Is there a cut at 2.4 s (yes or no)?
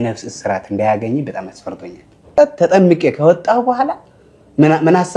yes